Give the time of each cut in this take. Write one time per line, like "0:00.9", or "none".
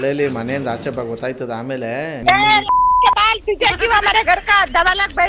0:02.2